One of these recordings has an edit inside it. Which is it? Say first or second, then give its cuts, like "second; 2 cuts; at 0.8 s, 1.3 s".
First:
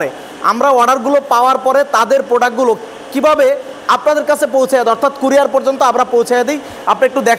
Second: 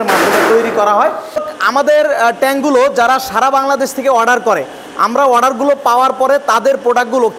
second; 1 cut; at 1.2 s